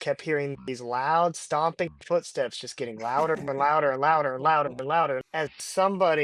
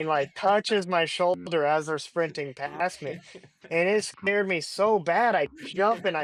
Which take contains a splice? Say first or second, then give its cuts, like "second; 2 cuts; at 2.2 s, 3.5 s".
first; 1 cut; at 5.2 s